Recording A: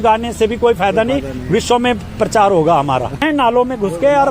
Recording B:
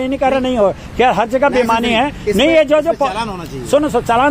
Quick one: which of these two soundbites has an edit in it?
A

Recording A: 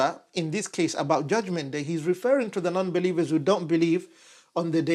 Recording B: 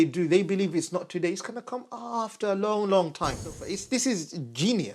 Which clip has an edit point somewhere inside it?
B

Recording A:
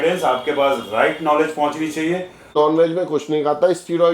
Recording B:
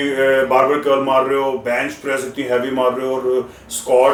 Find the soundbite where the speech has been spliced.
A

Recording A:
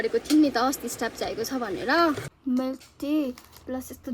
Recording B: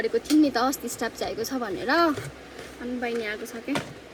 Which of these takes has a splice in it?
A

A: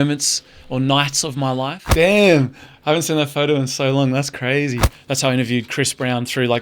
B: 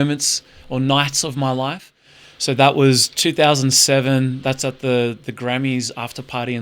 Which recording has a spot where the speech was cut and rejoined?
A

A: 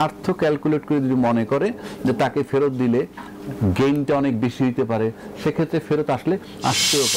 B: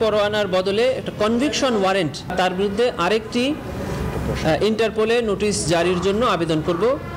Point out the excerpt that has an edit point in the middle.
B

